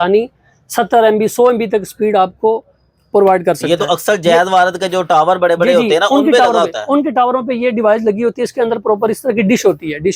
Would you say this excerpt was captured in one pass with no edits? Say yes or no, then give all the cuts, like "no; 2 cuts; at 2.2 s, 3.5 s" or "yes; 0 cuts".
yes; 0 cuts